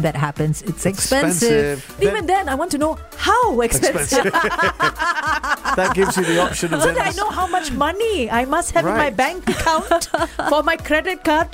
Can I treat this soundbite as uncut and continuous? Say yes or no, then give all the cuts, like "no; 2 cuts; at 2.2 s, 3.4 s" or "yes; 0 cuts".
no; 1 cut; at 2.0 s